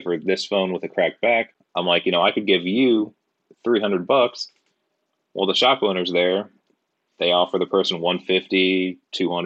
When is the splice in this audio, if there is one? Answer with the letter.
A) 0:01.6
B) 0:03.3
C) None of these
A